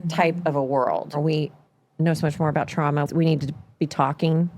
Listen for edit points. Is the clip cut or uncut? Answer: cut